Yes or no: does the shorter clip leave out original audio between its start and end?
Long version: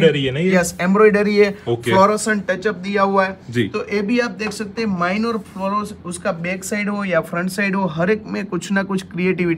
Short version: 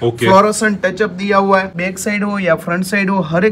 yes